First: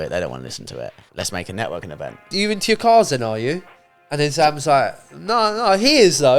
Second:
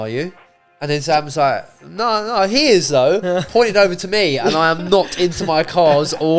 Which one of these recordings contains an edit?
first; 2 cuts; at 1.0 s, 2.2 s

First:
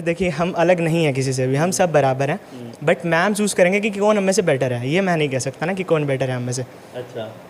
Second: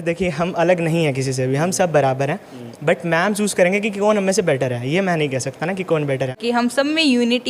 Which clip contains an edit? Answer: second; 1 cut; at 6.4 s

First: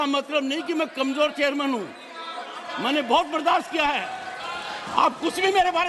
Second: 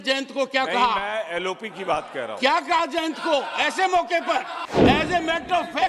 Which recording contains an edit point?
second; 1 cut; at 4.8 s

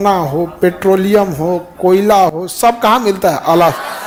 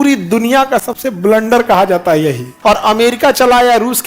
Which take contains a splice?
second; 1 cut; at 2.5 s

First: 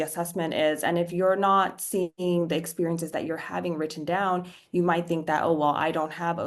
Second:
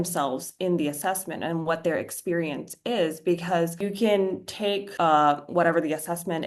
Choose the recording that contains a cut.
second; 2 cuts; at 3.8 s, 4.9 s

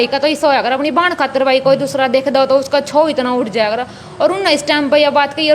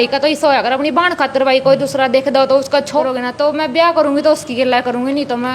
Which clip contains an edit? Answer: second; 1 cut; at 3.0 s

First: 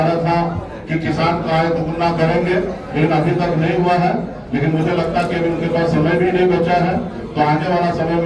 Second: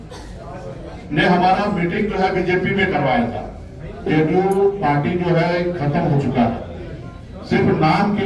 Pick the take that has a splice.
second; 1 cut; at 4.1 s

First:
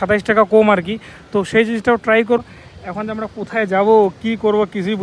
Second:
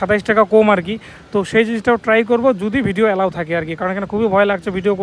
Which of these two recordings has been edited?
first; 1 cut; at 2.4 s

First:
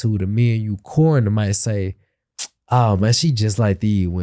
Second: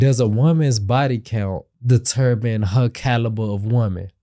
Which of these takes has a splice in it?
second; 1 cut; at 1.7 s

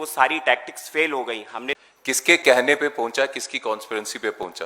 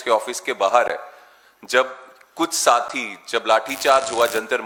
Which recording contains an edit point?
first; 1 cut; at 1.7 s

